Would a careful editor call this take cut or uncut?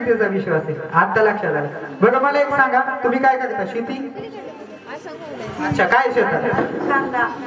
uncut